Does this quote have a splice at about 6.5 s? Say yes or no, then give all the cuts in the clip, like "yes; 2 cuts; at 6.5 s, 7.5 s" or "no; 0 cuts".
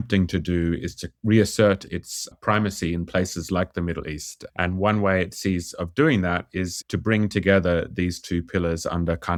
no; 0 cuts